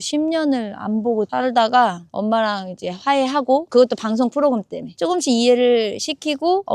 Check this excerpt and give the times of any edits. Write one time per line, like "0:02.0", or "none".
0:05.0